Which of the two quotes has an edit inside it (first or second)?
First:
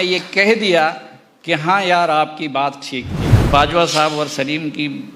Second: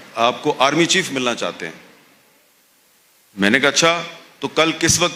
first